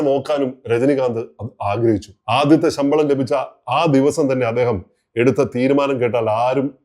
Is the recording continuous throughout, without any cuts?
no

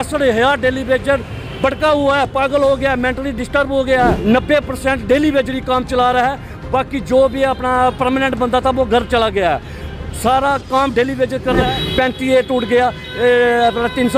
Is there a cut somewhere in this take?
yes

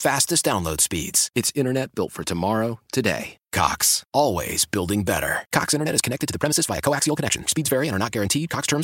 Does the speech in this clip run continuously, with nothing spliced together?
yes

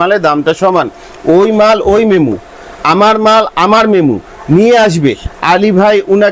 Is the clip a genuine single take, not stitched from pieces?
yes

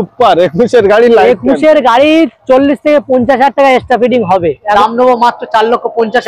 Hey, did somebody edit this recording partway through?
yes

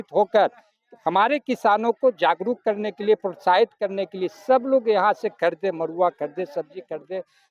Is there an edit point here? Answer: no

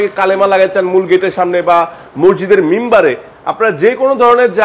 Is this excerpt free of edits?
yes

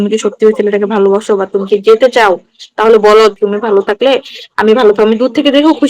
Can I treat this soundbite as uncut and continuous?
no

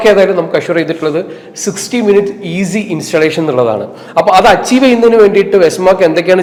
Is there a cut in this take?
no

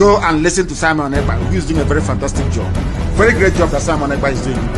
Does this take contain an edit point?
no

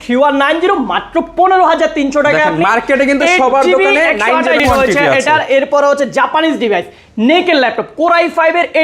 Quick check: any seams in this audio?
yes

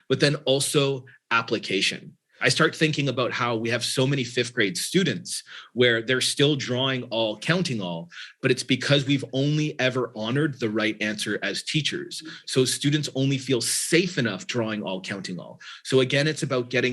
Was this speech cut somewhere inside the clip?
yes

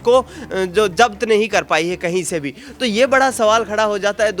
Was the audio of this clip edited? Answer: no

